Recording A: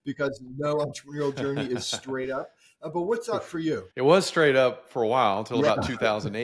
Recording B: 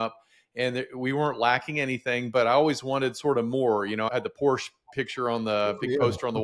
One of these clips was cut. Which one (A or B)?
A